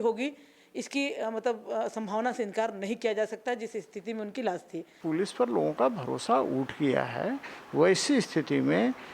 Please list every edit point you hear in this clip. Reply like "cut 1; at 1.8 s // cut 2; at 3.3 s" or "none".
cut 1; at 4.9 s